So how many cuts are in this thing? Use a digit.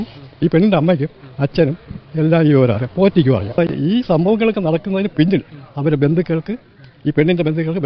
1